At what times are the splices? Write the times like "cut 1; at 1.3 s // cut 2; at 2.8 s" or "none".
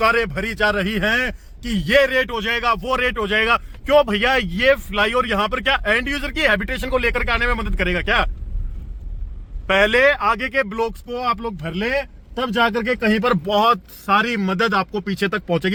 none